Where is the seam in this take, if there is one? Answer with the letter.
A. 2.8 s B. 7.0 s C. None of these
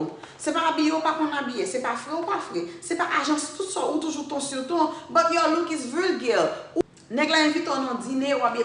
B